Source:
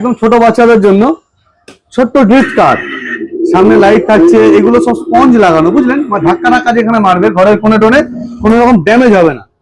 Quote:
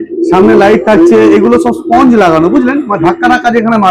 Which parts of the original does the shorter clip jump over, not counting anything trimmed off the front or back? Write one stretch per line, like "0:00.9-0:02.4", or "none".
none